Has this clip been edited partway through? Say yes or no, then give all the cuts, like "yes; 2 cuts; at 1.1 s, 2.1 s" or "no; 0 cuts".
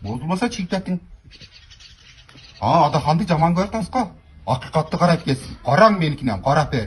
no; 0 cuts